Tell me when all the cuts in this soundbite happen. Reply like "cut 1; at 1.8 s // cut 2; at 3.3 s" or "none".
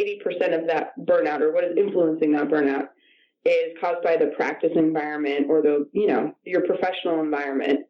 none